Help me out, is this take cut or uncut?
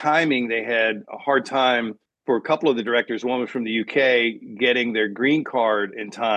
uncut